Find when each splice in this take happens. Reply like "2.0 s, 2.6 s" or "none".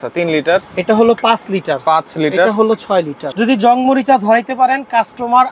3.2 s